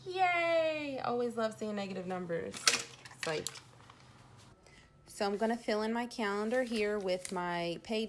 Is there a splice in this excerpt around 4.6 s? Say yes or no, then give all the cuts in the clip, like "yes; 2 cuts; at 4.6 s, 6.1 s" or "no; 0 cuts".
yes; 1 cut; at 4.6 s